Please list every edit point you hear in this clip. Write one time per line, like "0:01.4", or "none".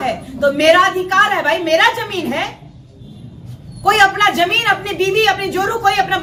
none